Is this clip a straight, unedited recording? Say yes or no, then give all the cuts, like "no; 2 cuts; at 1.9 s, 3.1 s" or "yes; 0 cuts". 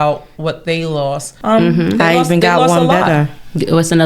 no; 1 cut; at 1.3 s